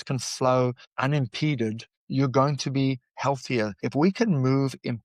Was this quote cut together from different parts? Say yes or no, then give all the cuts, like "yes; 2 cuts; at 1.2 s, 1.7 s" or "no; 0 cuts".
yes; 3 cuts; at 0.9 s, 1.9 s, 3.8 s